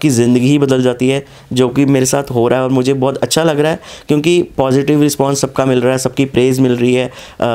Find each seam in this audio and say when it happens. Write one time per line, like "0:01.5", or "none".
none